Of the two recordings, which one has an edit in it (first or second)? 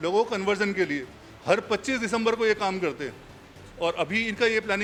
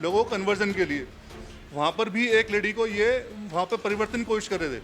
second